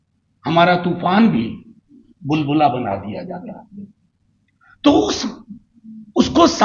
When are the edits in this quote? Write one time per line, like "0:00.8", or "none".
none